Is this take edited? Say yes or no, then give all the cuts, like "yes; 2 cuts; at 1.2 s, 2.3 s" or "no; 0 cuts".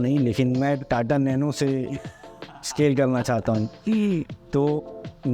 no; 0 cuts